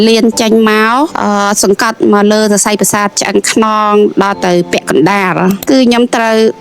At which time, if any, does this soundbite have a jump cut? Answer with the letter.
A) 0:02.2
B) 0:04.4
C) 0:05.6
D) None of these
C